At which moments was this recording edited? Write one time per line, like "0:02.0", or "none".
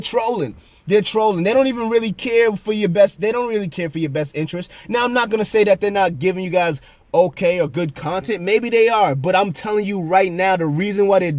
none